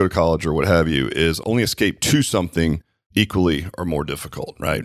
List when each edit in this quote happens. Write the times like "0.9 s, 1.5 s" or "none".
2.9 s